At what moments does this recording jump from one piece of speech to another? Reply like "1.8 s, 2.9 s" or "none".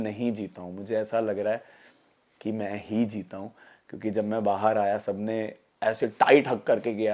none

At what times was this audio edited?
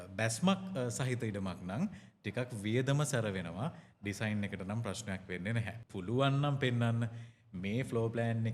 5.8 s

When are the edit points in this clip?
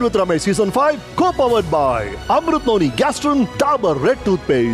1.1 s, 3.5 s

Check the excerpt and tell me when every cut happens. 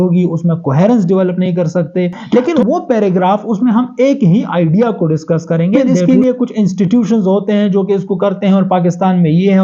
2.2 s, 5.9 s

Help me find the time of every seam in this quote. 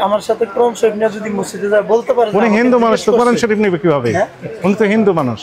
none

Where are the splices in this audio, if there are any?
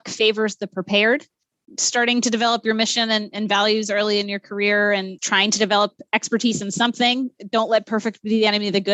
none

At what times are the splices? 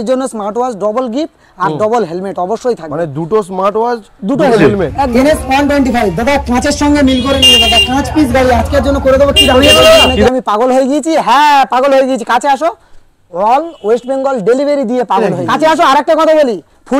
5.1 s, 10.3 s, 15.3 s

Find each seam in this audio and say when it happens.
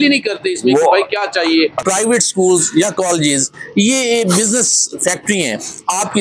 1.8 s

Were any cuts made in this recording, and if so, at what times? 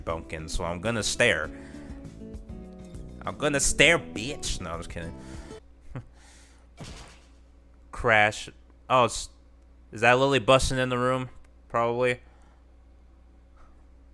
5.6 s

